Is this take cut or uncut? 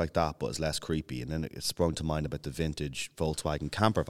uncut